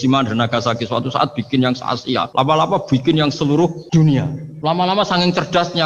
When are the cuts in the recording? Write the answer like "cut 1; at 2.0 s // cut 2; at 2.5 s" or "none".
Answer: cut 1; at 2.3 s // cut 2; at 4.1 s